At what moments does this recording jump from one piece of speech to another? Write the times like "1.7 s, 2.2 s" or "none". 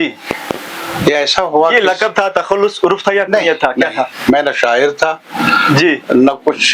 none